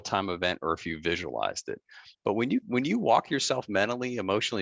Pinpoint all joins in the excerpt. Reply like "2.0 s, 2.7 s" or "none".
2.0 s